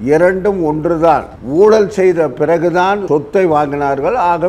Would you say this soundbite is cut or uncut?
cut